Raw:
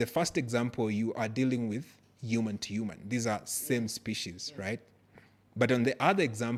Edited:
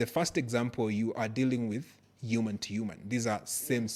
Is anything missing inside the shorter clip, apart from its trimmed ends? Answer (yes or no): no